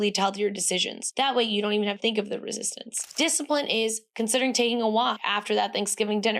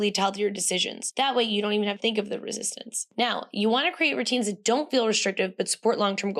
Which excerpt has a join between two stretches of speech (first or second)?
first